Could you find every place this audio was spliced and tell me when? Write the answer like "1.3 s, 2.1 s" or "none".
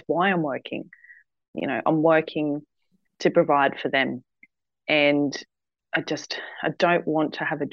none